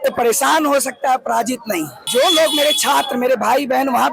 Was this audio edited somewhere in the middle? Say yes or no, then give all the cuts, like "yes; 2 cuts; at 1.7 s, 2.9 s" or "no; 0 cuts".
yes; 1 cut; at 2.0 s